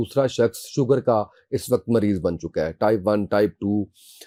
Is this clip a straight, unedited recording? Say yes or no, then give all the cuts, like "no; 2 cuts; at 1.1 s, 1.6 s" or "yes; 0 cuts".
yes; 0 cuts